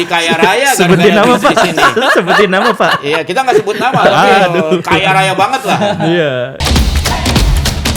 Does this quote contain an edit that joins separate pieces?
yes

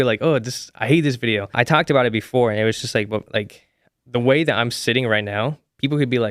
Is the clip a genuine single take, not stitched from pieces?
no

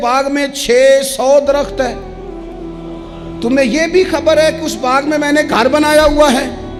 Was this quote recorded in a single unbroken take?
yes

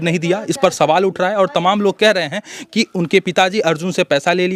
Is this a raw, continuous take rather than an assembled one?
yes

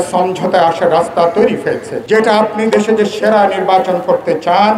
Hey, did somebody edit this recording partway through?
yes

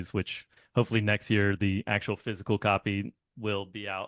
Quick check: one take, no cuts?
yes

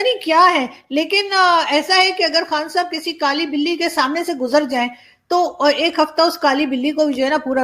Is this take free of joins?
yes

